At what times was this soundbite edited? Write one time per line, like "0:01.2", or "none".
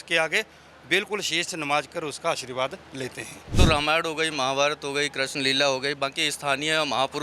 0:03.4

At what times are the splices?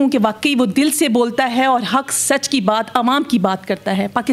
none

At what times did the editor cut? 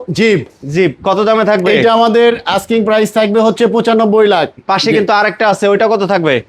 0:04.6

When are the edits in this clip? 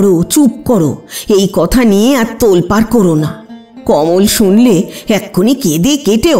none

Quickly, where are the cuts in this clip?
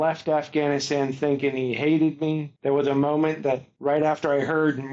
0:02.5
0:03.7

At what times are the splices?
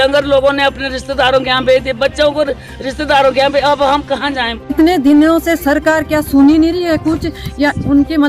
0:04.7

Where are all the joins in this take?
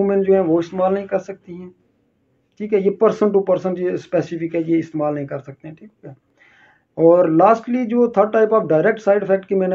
none

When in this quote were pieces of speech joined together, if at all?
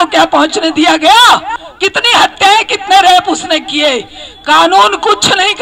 0:01.6

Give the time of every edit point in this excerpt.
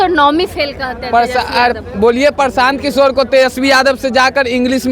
none

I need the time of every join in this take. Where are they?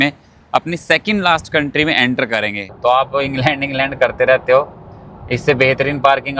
0:02.7

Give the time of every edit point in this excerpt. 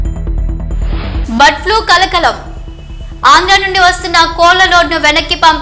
0:01.0

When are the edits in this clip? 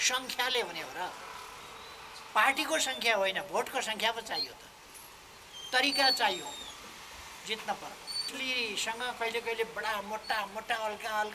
0:08.3

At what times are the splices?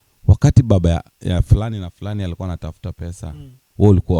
none

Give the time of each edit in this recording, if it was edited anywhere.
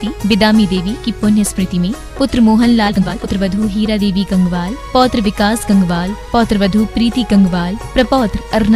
0:03.0

